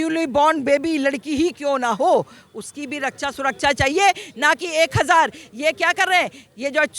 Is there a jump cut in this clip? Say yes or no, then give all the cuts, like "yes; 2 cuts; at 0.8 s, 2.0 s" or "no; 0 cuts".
no; 0 cuts